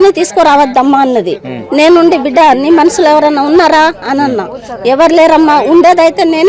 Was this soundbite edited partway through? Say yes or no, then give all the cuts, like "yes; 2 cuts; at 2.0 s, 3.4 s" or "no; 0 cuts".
no; 0 cuts